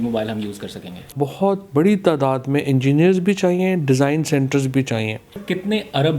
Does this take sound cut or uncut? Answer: cut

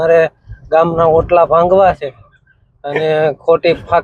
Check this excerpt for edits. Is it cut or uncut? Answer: uncut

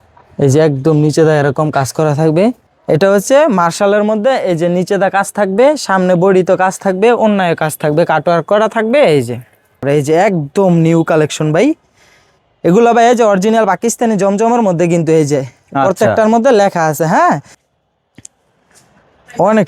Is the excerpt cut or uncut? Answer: cut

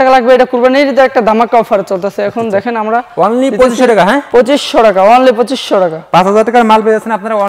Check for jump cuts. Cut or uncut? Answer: uncut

